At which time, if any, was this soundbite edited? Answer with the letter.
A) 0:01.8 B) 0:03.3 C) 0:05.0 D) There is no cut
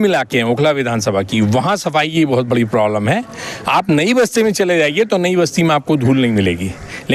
D